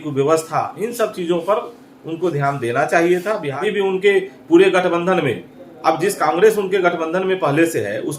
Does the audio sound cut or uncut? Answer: cut